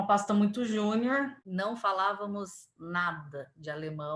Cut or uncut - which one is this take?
cut